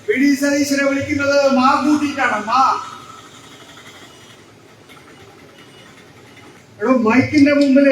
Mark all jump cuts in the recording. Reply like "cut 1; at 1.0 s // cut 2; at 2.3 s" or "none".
cut 1; at 6.6 s